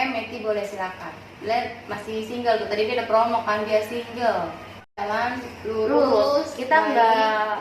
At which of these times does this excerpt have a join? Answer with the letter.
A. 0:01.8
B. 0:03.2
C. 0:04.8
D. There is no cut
C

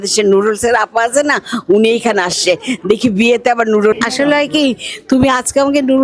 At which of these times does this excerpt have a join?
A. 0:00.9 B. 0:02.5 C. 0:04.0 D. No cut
C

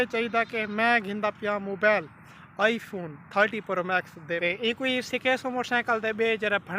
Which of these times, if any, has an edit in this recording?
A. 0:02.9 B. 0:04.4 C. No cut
B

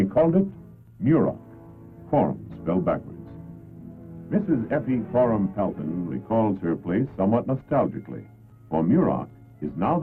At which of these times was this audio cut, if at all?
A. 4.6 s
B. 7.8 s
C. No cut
C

